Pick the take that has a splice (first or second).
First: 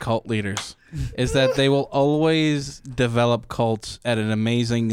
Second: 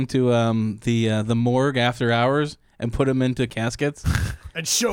second